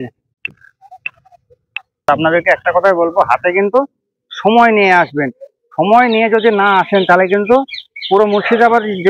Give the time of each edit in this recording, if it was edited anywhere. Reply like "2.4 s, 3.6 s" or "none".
1.8 s